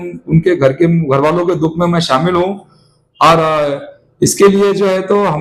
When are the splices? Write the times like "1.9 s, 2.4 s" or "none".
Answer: none

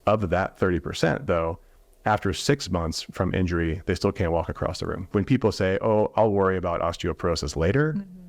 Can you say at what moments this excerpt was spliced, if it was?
5.1 s

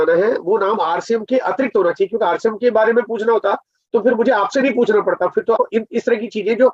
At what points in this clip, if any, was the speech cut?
5.6 s

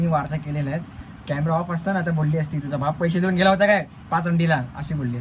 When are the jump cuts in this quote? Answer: none

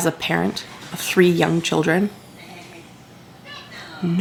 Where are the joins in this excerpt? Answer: none

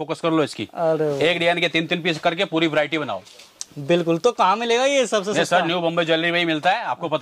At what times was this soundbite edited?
none

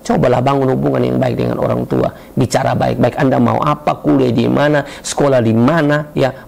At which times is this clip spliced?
none

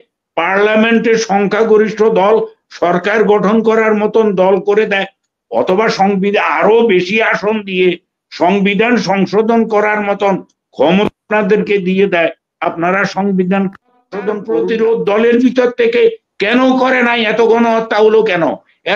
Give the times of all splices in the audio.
14.4 s

